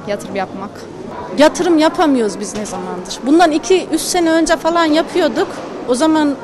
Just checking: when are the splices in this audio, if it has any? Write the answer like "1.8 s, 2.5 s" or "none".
none